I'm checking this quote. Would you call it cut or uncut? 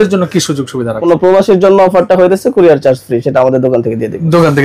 cut